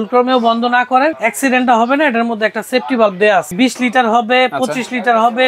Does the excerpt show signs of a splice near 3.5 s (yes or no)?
yes